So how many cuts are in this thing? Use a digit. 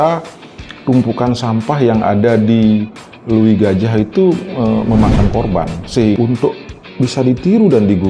1